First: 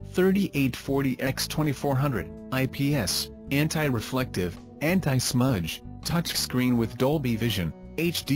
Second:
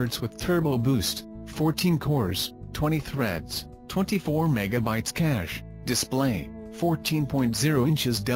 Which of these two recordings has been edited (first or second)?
second